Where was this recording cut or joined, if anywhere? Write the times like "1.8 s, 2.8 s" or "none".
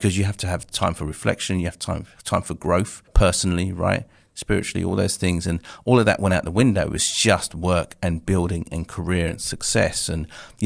3.0 s